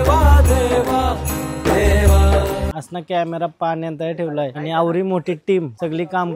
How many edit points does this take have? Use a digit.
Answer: 1